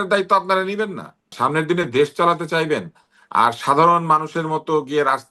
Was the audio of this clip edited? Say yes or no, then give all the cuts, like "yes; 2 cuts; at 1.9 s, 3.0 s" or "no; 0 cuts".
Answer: yes; 1 cut; at 1.3 s